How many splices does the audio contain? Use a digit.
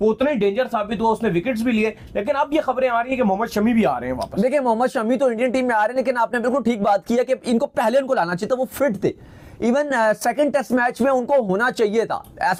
0